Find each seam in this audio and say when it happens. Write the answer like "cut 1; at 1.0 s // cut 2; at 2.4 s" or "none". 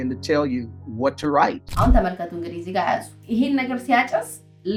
none

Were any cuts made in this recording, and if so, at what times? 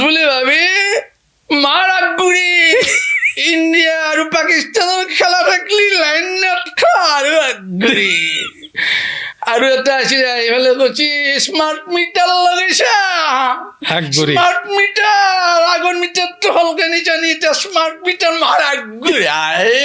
none

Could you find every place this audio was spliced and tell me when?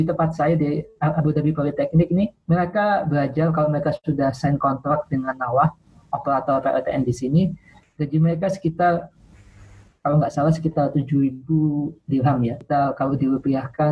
cut 1; at 2.4 s // cut 2; at 12.6 s

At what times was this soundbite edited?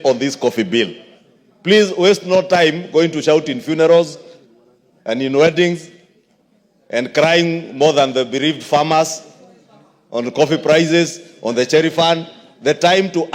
none

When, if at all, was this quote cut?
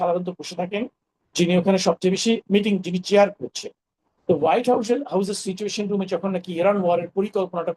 none

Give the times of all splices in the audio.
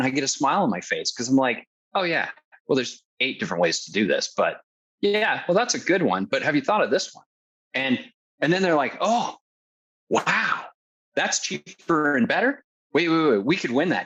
none

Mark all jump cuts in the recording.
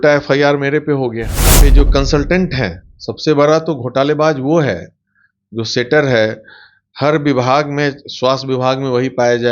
cut 1; at 1.6 s

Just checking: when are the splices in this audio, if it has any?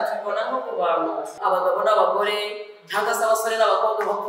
cut 1; at 1.3 s

